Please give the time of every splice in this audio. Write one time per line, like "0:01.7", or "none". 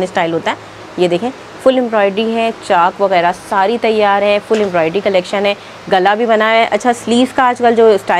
none